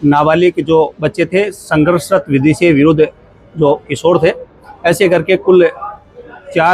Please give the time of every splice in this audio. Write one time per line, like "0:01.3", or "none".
none